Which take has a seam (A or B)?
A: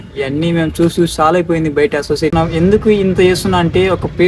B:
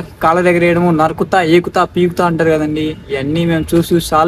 A